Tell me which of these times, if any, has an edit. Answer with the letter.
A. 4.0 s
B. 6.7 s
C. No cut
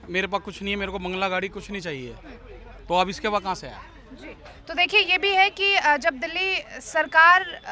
C